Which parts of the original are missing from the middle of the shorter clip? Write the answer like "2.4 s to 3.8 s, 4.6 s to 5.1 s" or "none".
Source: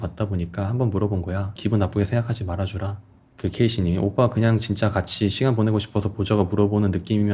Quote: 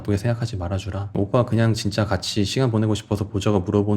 3.0 s to 4.0 s